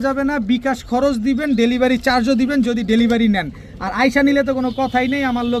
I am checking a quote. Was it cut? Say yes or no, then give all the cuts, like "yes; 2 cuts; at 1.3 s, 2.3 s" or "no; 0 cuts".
no; 0 cuts